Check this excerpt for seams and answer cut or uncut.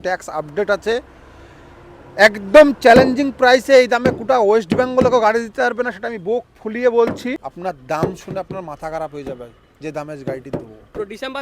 cut